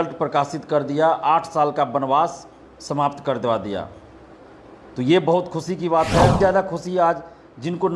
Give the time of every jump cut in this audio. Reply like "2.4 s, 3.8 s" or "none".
6.4 s